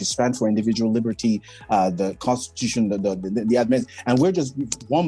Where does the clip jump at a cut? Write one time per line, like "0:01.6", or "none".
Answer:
none